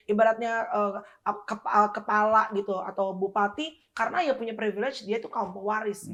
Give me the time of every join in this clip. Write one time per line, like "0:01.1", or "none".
none